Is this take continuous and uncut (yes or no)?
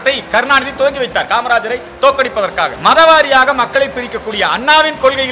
no